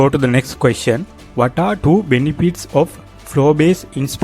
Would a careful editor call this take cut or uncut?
cut